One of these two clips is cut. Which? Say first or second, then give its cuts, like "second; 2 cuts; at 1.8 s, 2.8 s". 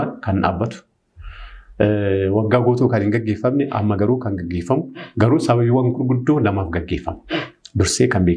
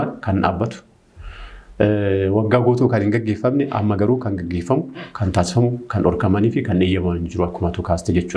first; 1 cut; at 5.0 s